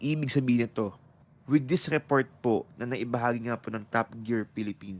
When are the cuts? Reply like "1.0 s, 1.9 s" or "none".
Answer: 1.1 s